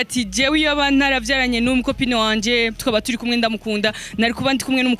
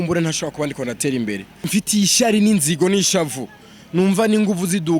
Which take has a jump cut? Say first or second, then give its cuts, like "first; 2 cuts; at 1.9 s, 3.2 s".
second; 1 cut; at 1.6 s